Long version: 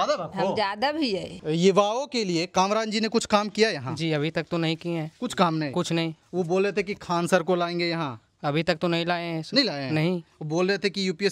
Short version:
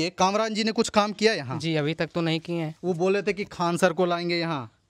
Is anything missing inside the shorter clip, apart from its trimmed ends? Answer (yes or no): yes